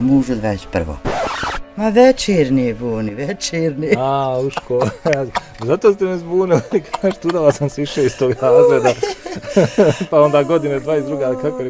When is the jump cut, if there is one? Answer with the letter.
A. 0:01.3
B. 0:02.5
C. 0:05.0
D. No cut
A